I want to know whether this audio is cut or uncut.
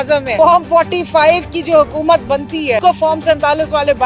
cut